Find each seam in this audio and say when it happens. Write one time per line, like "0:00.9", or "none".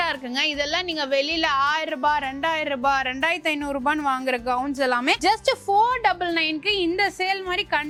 none